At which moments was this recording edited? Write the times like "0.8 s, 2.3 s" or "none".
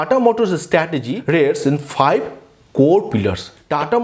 1.1 s